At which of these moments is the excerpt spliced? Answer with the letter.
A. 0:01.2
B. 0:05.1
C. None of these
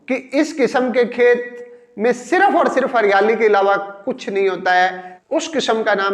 B